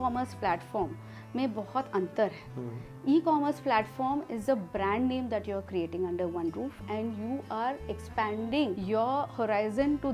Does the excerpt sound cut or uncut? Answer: cut